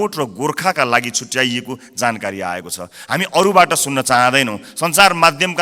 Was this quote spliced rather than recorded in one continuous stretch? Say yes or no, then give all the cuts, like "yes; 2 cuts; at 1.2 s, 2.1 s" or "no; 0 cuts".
no; 0 cuts